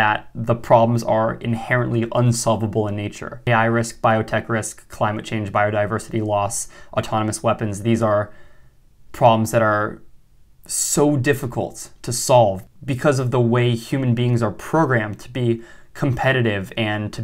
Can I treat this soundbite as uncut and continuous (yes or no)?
no